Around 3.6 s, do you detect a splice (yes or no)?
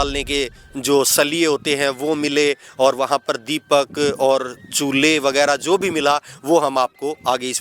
no